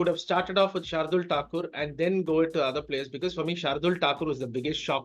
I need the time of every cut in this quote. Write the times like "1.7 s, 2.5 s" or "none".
none